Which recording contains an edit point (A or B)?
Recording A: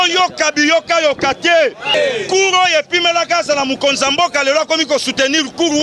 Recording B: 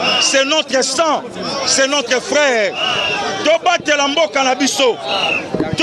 A